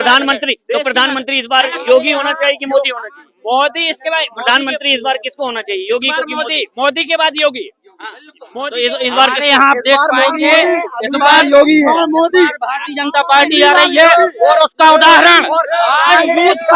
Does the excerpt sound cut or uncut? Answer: uncut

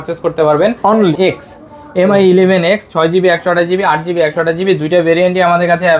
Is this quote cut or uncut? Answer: cut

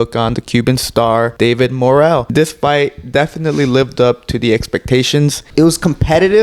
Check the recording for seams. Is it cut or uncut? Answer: cut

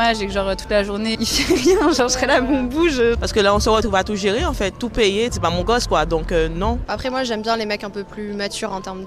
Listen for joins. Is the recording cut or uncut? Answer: cut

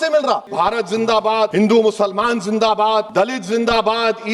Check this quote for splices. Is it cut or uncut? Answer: cut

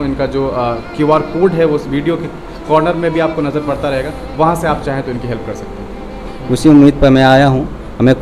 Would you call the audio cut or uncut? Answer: cut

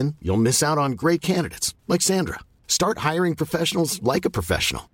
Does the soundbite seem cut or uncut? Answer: uncut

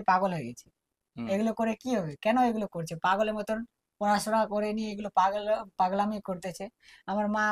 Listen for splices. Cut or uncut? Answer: uncut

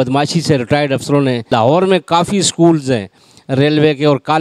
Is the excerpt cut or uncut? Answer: cut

